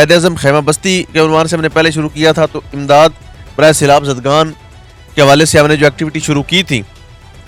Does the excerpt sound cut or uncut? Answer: uncut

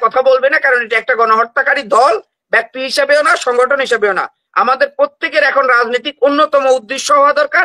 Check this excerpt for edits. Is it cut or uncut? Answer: uncut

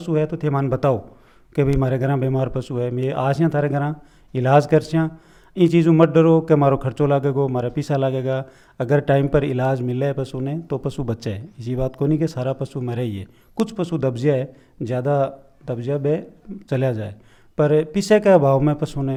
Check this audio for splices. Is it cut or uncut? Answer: uncut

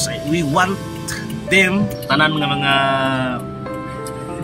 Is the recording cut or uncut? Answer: cut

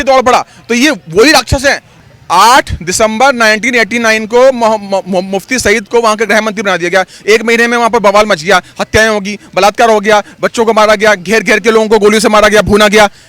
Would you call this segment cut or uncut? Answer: cut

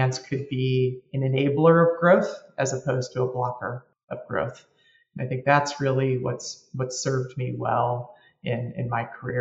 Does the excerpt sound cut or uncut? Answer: cut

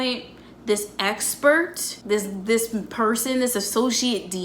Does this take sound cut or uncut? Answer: cut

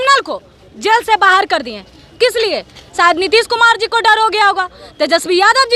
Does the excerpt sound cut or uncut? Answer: uncut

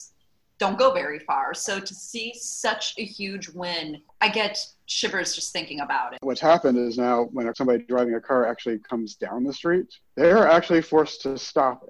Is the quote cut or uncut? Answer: cut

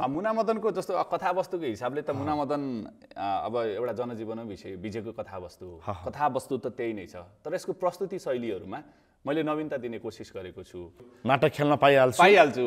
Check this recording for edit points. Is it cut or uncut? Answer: cut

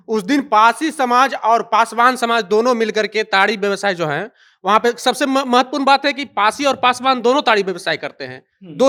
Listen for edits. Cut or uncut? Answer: uncut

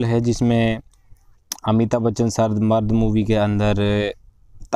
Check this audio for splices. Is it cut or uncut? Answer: uncut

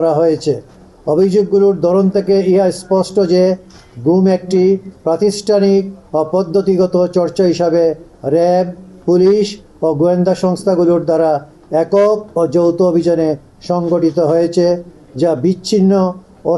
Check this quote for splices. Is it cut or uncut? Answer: uncut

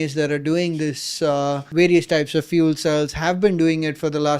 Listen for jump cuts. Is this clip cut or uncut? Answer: cut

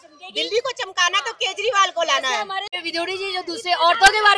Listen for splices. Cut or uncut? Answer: cut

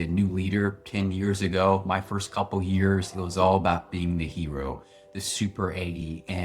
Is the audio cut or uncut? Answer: uncut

